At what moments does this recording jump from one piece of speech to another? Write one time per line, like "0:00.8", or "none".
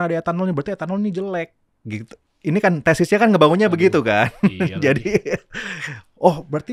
none